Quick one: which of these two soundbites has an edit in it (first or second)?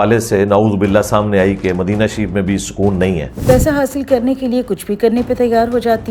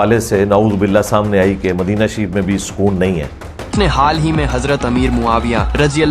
first